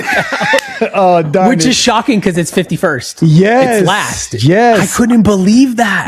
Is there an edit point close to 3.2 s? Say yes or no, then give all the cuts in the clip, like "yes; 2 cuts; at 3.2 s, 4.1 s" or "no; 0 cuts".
no; 0 cuts